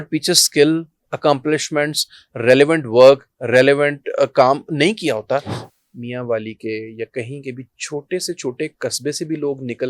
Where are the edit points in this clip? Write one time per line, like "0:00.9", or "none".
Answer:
0:05.6